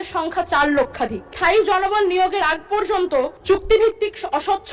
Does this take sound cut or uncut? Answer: cut